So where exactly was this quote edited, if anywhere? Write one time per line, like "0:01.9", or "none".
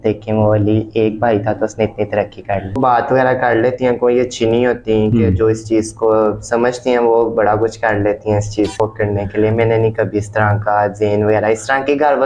0:02.8
0:08.8